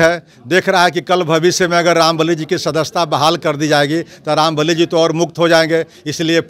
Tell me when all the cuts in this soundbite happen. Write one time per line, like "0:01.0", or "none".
none